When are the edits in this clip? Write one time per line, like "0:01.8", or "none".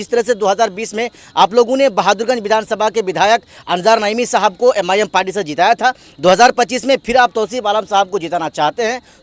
none